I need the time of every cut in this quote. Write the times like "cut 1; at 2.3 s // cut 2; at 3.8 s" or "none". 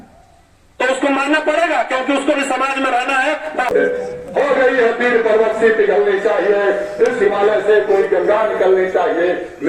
cut 1; at 3.7 s